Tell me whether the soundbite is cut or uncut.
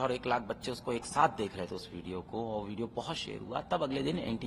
uncut